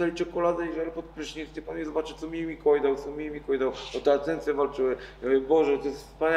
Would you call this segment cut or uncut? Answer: uncut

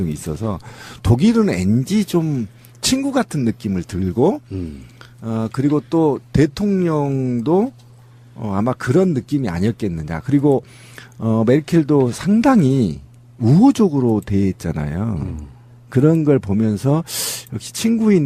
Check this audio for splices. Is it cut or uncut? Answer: uncut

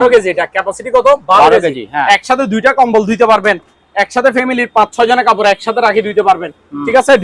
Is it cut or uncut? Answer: uncut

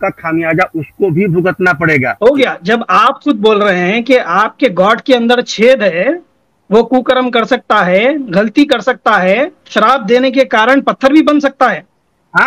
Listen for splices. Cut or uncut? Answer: cut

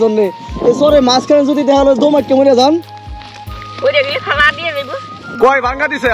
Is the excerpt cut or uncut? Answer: cut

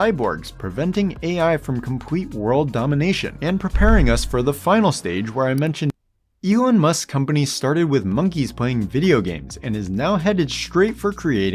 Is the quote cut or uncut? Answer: cut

